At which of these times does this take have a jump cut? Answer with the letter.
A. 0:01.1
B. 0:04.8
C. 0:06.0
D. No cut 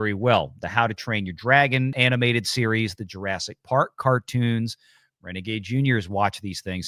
D